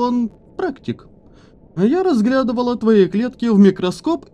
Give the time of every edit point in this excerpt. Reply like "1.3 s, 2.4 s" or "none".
none